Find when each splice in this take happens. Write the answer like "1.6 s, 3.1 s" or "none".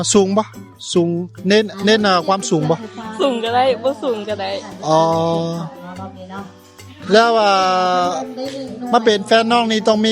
none